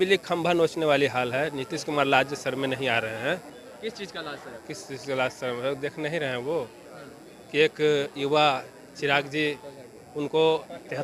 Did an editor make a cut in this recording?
no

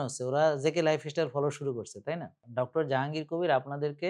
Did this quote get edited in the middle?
yes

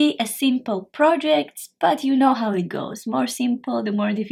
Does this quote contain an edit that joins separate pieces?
no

